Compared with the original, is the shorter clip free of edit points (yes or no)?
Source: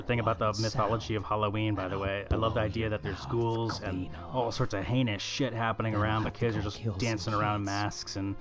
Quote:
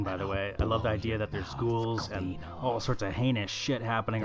yes